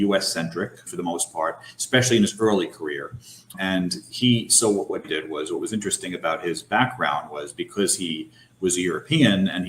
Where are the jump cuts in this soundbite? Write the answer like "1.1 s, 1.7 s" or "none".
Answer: 0.9 s, 3.5 s, 5.0 s